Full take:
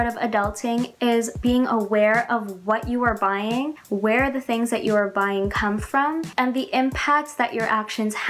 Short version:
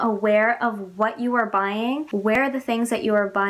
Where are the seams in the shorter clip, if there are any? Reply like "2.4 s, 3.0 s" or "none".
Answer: 2.2 s